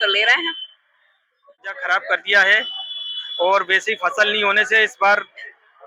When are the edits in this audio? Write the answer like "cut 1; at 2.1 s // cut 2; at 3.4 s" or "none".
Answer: cut 1; at 1.7 s